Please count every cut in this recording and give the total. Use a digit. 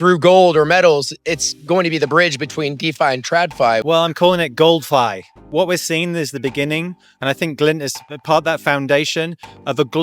1